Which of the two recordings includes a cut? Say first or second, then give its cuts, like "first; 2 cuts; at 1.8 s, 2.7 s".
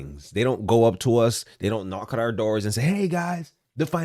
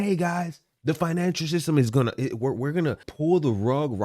second; 1 cut; at 3.1 s